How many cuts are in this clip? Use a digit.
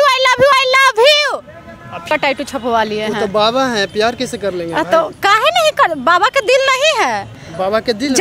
1